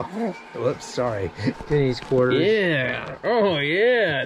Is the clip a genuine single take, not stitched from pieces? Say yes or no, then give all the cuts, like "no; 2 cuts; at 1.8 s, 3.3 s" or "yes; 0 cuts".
no; 1 cut; at 1.6 s